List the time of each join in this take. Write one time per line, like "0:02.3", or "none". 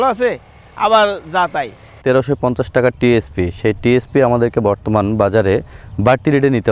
0:01.8